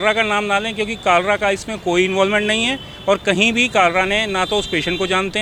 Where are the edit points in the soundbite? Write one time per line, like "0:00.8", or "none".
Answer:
none